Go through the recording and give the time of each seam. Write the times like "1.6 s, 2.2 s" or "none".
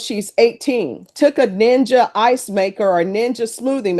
1.1 s